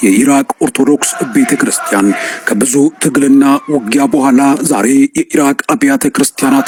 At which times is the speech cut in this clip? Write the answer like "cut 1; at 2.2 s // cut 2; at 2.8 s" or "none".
none